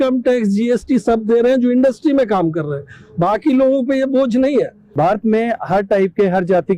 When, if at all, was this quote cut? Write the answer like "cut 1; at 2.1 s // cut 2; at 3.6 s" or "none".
cut 1; at 4.8 s